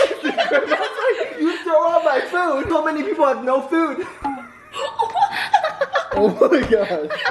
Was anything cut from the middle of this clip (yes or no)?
yes